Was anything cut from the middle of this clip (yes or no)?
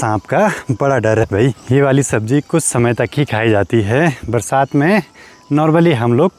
no